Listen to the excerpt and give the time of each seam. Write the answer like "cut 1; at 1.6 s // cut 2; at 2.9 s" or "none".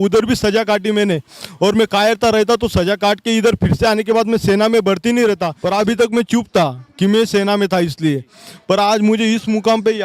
cut 1; at 5.5 s

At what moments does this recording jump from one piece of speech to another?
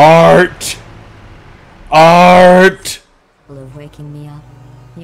cut 1; at 3.4 s

